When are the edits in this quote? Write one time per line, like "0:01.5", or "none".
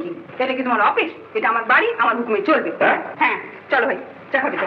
none